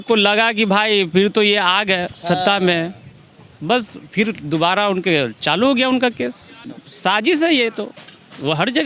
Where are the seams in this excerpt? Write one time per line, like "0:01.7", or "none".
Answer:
none